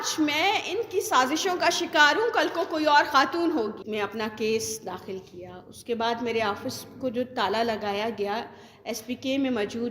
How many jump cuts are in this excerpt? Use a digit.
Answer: 1